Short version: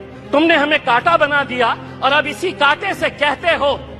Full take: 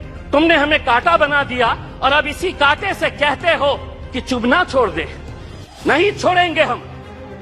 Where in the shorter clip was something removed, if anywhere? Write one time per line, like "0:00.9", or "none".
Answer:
none

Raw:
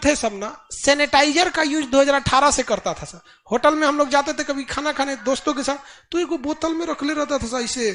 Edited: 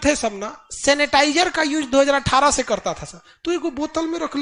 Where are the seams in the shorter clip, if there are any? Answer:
0:03.3

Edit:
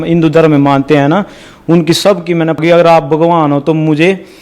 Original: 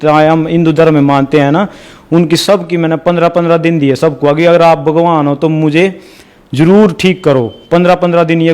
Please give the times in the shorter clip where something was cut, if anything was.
0:02.6

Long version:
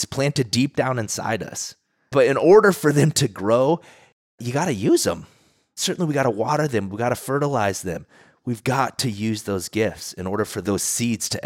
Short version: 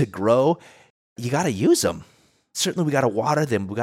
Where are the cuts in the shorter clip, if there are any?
none

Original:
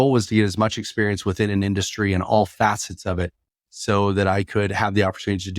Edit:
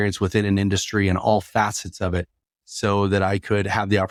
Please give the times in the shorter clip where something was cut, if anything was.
none

